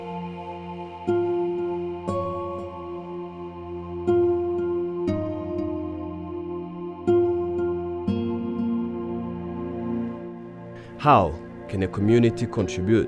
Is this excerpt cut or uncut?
cut